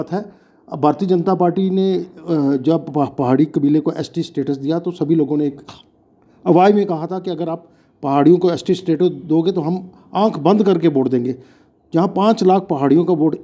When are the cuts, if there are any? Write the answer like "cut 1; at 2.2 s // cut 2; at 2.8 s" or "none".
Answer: none